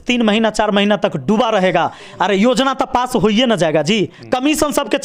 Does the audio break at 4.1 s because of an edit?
no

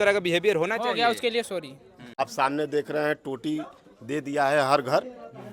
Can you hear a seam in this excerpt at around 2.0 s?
yes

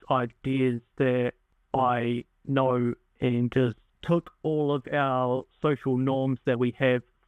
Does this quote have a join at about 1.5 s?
yes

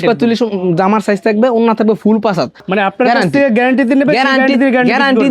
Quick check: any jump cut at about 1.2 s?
no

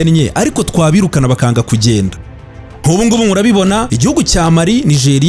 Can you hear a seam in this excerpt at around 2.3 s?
yes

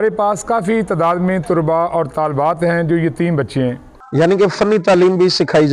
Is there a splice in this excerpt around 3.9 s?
yes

